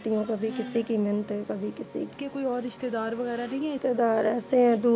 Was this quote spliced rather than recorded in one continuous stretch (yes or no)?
yes